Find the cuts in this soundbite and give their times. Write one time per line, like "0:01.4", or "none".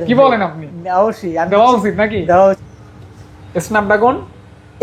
0:02.6